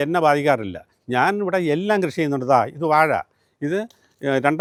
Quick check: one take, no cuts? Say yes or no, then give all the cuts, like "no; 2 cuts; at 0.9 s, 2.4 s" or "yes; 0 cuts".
yes; 0 cuts